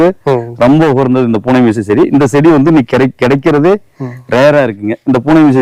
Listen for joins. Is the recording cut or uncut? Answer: uncut